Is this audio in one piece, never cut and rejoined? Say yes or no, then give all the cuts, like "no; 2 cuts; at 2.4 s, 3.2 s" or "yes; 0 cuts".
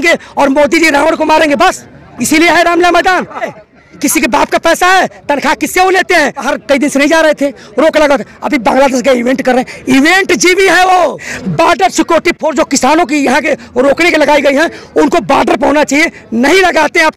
no; 3 cuts; at 3.5 s, 6.5 s, 11.4 s